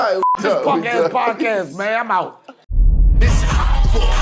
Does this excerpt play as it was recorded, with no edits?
no; 1 cut; at 2.4 s

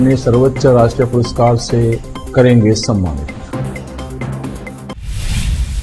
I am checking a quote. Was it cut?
yes; 1 cut; at 4.9 s

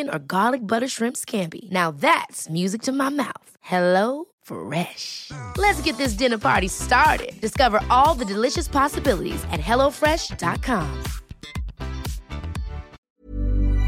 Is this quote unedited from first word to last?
no; 1 cut; at 13.0 s

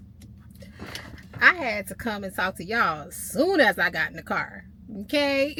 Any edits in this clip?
no; 0 cuts

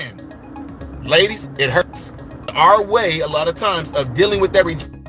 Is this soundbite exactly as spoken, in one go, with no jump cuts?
no; 1 cut; at 2.5 s

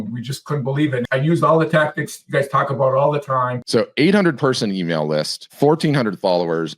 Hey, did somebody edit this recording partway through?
yes; 3 cuts; at 1.1 s, 3.6 s, 5.4 s

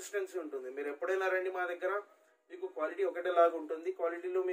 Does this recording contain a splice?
no; 0 cuts

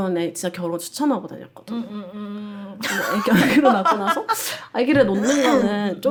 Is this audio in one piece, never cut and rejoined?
yes; 0 cuts

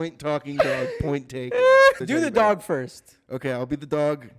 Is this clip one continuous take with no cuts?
no; 1 cut; at 2.0 s

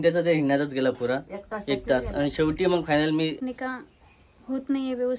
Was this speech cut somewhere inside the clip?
yes; 1 cut; at 3.5 s

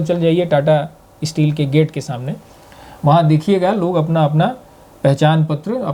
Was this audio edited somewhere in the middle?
no; 0 cuts

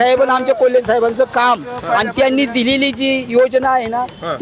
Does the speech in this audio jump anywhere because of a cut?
no; 0 cuts

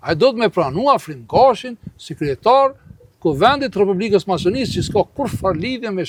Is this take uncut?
yes; 0 cuts

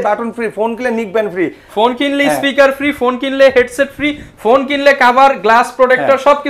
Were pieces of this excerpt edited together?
no; 0 cuts

